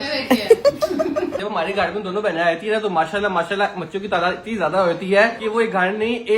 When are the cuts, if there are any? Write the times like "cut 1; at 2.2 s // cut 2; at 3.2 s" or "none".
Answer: cut 1; at 1.4 s // cut 2; at 5.4 s